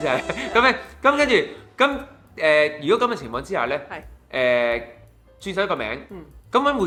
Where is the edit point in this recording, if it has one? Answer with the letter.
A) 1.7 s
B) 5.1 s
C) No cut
C